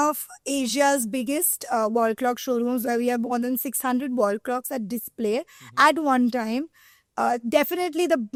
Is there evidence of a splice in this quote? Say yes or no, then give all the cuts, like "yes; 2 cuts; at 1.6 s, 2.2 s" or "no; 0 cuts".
no; 0 cuts